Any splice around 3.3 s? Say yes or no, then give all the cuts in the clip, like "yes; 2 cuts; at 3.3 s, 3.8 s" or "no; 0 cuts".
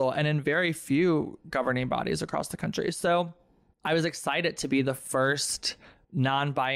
yes; 1 cut; at 3.3 s